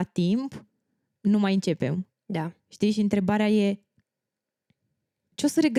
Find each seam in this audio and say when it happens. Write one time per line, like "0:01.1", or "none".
none